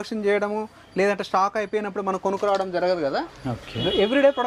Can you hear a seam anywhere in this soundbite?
no; 0 cuts

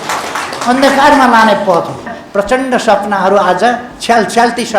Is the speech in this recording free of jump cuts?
no; 1 cut; at 2.2 s

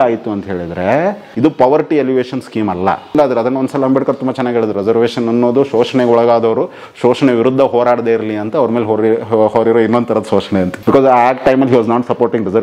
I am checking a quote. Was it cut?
yes; 3 cuts; at 1.3 s, 3.1 s, 10.7 s

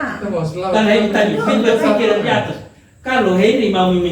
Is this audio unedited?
yes; 0 cuts

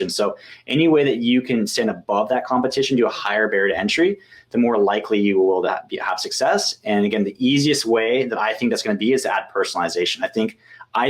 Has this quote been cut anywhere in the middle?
no; 0 cuts

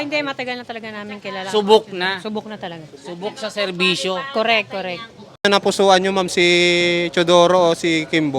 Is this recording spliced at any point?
yes; 1 cut; at 5.4 s

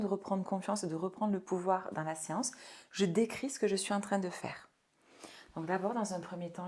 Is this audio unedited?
yes; 0 cuts

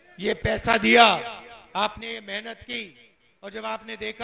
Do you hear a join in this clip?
no; 0 cuts

